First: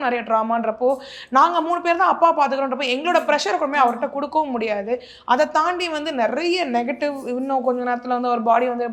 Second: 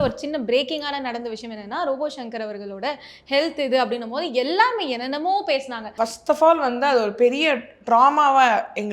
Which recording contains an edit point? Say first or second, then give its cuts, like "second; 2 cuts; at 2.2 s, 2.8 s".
second; 1 cut; at 5.8 s